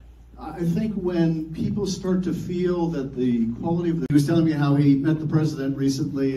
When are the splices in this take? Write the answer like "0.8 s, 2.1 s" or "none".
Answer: none